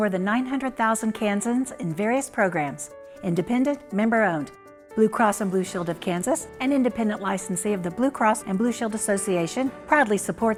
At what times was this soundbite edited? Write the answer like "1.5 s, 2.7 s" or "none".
none